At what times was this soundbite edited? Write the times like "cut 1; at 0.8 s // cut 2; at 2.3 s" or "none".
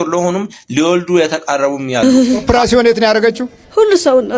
cut 1; at 2.0 s